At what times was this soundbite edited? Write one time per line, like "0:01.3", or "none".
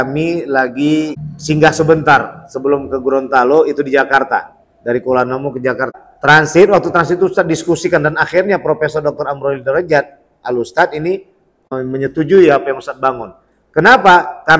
none